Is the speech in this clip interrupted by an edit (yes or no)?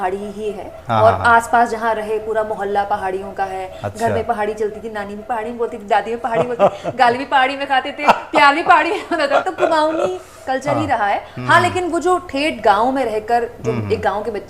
no